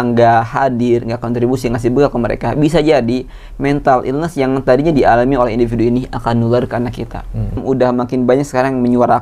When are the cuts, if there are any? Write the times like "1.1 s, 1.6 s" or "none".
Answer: 7.6 s

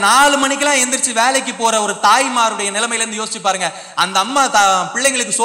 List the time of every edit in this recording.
none

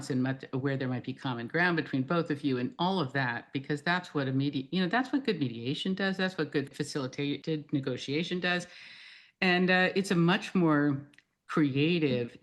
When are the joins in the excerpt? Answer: 6.9 s

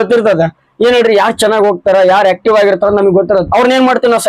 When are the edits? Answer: none

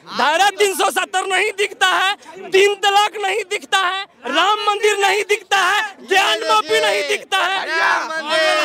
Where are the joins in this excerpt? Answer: none

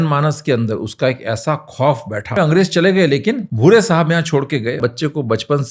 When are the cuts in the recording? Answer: 2.4 s, 3.5 s, 4.8 s

